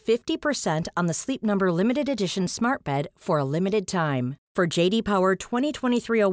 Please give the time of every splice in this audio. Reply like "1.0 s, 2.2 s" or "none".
none